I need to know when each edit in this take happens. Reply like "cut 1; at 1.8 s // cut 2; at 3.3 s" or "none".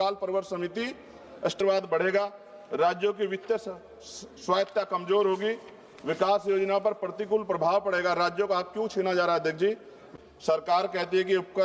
cut 1; at 1.6 s // cut 2; at 10.0 s